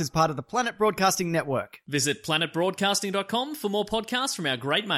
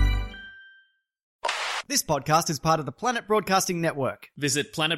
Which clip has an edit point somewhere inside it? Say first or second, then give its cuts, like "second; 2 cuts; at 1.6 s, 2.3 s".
second; 1 cut; at 1.5 s